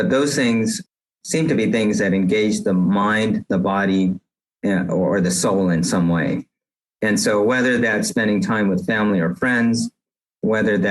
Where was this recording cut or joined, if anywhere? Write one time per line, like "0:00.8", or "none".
0:01.0